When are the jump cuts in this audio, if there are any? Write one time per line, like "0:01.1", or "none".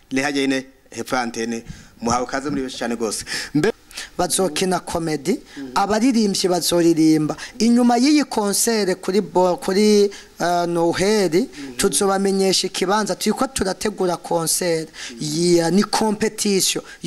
0:03.7